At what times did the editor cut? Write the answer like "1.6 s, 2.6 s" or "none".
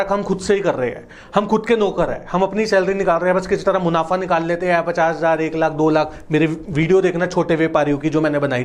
none